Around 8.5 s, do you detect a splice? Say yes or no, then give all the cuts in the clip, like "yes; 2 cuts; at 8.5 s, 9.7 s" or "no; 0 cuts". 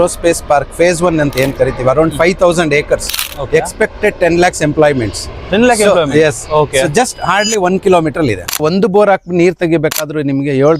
yes; 1 cut; at 8.5 s